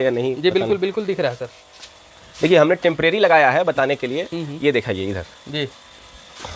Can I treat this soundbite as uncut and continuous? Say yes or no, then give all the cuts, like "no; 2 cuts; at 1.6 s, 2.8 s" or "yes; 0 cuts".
yes; 0 cuts